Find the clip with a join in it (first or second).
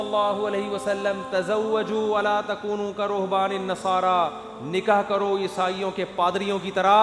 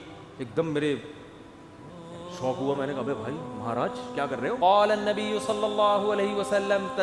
second